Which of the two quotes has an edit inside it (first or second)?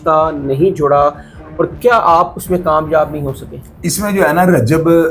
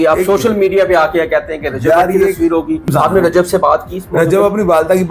second